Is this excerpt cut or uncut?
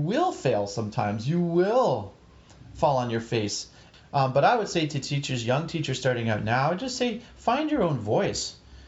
uncut